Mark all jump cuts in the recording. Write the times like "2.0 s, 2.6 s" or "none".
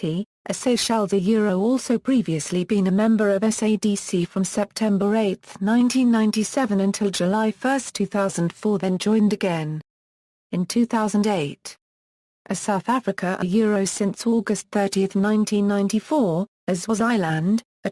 1.4 s